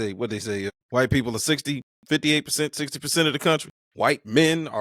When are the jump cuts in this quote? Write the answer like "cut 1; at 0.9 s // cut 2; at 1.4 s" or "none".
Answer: cut 1; at 0.7 s // cut 2; at 1.9 s // cut 3; at 3.8 s